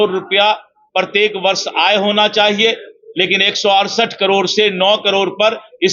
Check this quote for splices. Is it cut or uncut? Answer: uncut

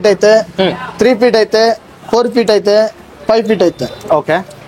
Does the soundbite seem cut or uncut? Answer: uncut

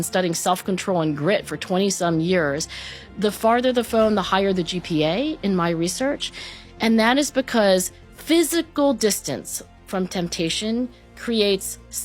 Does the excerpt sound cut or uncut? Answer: uncut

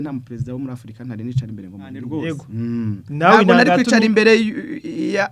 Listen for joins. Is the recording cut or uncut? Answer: cut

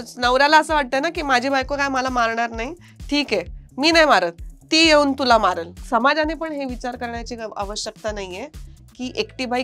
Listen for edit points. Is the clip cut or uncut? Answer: cut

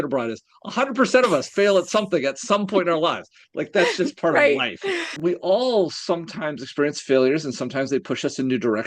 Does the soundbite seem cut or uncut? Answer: cut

